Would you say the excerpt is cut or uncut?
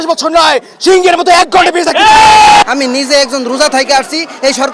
cut